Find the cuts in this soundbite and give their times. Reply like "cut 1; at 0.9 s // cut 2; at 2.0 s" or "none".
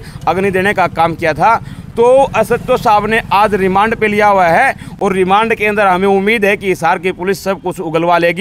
none